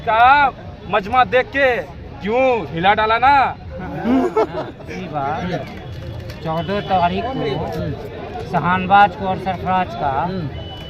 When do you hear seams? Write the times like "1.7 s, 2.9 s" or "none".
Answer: 4.7 s